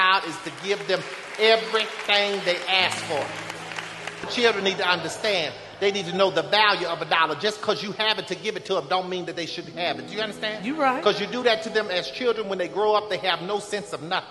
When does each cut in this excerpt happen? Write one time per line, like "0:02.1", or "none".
0:04.3